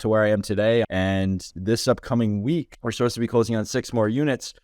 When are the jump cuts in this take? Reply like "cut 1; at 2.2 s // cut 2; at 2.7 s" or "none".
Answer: cut 1; at 0.9 s // cut 2; at 2.8 s